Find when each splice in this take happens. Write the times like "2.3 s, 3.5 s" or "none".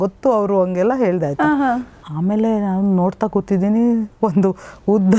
none